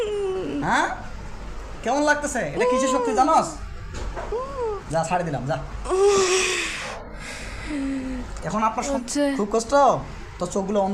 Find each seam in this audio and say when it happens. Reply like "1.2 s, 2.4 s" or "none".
8.9 s